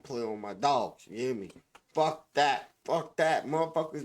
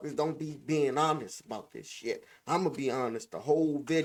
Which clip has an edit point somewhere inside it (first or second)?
first